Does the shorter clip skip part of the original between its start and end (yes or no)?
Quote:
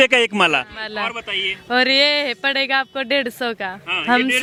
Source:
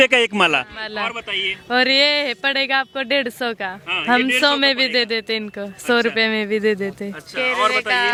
no